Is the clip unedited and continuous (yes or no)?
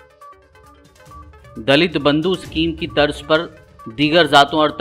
yes